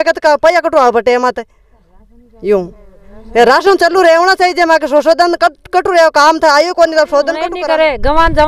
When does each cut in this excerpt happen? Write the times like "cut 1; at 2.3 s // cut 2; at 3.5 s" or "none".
cut 1; at 7.5 s